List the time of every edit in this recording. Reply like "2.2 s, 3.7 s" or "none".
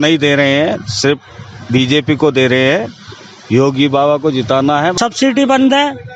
5.0 s